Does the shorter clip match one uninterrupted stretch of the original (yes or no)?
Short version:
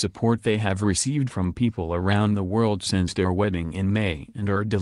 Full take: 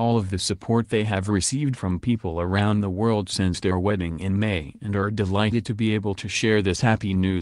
yes